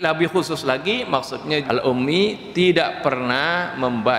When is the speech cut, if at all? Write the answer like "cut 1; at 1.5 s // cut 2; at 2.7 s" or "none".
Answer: cut 1; at 1.6 s